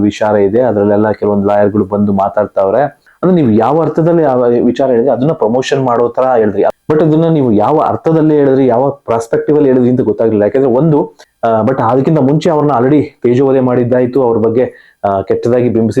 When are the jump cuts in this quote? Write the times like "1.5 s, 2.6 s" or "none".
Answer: 3.0 s, 6.7 s, 11.2 s